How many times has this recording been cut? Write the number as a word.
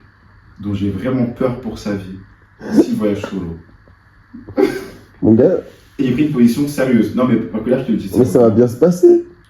zero